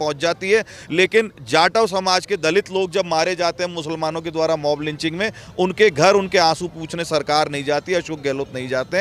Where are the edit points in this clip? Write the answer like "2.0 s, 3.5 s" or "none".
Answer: none